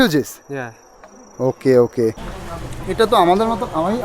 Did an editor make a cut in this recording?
yes; 1 cut; at 2.3 s

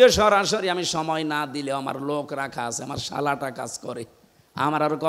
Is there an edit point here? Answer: no; 0 cuts

